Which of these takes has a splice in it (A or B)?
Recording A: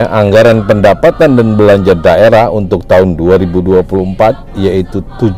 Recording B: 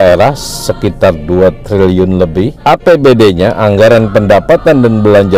B